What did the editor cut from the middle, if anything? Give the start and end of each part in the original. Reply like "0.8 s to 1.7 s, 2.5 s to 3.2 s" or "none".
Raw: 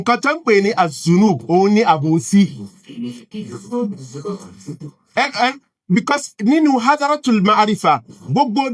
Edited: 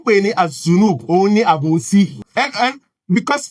2.6 s to 5.0 s